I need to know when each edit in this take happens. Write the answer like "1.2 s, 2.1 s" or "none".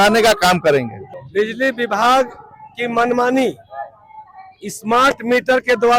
none